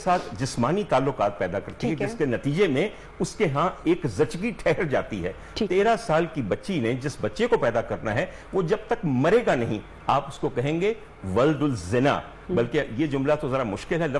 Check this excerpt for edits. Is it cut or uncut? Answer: uncut